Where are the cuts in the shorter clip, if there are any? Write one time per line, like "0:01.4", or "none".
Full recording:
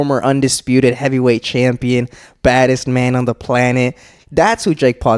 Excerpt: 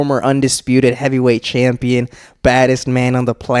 none